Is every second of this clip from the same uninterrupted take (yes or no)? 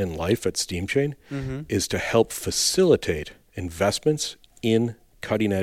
yes